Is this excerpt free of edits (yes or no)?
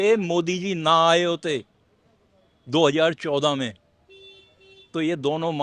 yes